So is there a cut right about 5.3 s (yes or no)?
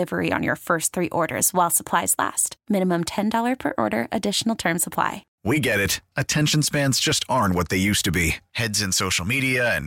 yes